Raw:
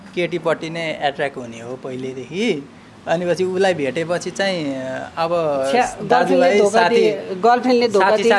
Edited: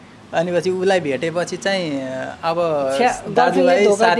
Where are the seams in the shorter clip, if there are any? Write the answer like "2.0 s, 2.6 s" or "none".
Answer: none